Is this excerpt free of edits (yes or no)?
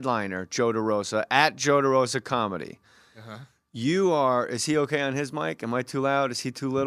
yes